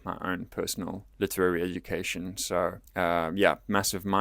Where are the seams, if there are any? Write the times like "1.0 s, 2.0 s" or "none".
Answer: 1.0 s, 2.8 s